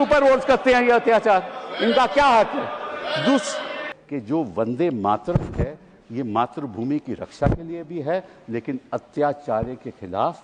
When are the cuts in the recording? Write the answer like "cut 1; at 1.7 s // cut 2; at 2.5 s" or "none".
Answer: cut 1; at 3.9 s